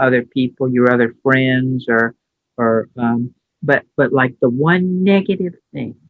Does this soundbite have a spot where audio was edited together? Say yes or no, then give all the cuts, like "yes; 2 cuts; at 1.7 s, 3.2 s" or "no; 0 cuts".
no; 0 cuts